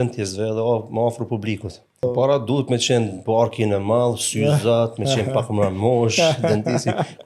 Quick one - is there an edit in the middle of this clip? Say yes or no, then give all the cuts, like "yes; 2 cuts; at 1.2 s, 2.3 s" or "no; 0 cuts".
yes; 1 cut; at 2.0 s